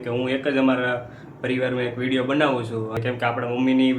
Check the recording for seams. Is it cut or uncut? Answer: cut